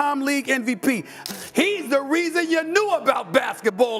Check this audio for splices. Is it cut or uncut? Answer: cut